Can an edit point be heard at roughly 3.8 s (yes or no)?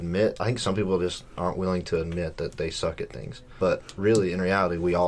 yes